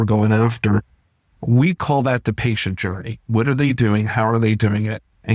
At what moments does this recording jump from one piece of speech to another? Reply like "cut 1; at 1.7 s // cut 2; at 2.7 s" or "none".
cut 1; at 3.2 s